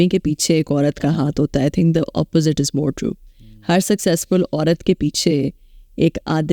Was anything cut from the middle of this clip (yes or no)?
no